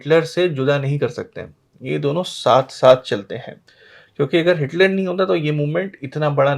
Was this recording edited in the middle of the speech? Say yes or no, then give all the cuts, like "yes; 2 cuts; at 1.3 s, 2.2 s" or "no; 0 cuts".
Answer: no; 0 cuts